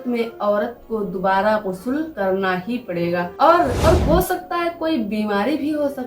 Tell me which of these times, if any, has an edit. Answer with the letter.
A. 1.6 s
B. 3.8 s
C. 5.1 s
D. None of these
B